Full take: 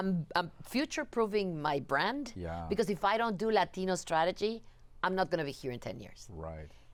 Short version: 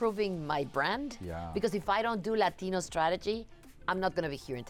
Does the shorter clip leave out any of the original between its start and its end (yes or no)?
no